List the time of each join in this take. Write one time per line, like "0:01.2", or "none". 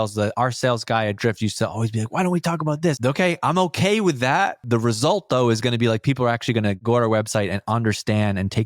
0:03.0
0:04.6
0:06.8